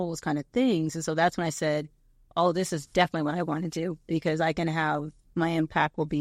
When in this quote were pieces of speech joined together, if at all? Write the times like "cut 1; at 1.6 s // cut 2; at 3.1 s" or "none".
cut 1; at 5.3 s